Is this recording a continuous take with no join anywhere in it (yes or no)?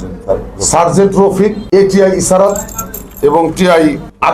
yes